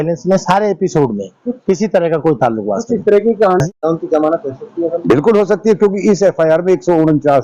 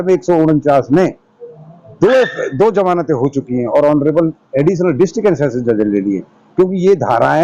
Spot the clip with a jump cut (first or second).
first